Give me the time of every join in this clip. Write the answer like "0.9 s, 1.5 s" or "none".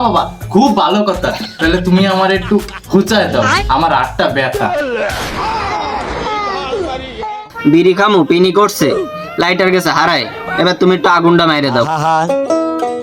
4.6 s, 7.4 s, 11.9 s